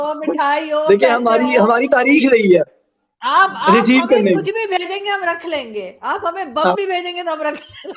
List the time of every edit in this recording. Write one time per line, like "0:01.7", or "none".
none

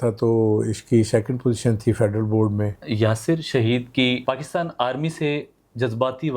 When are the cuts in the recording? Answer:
0:02.8
0:04.2

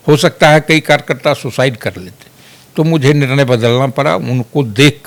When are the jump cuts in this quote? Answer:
none

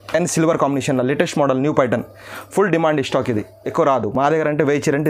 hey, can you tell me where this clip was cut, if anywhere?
none

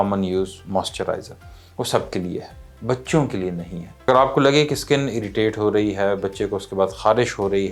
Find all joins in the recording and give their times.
0:04.1

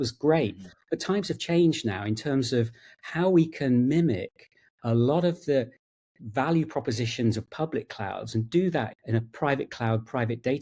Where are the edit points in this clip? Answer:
none

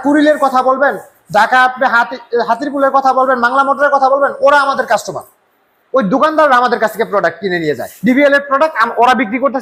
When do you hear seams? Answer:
none

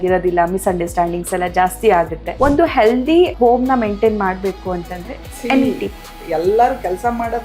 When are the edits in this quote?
0:02.2
0:03.3
0:06.1

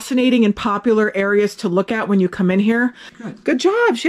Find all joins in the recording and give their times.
0:03.1

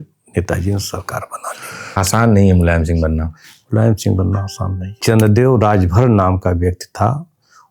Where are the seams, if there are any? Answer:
0:02.0
0:05.0

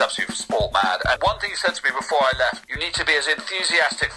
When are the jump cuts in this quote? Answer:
0:01.2
0:02.6

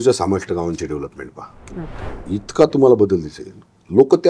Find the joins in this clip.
0:02.1

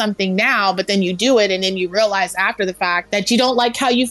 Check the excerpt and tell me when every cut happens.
0:03.0

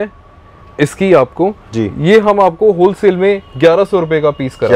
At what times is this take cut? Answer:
none

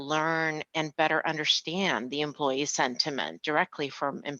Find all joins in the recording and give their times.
0:03.4

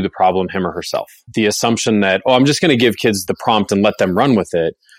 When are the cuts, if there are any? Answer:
0:01.2

